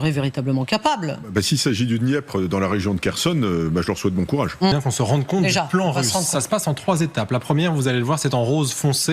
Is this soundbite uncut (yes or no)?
no